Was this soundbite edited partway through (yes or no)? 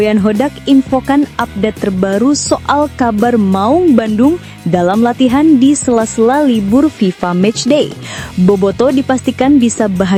no